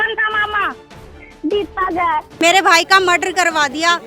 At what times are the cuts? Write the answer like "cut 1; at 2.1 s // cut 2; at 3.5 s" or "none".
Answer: cut 1; at 2.4 s